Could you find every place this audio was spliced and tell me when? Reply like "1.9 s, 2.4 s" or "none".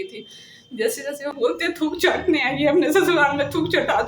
1.3 s